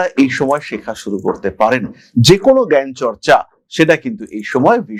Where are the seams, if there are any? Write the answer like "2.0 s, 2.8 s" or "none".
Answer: none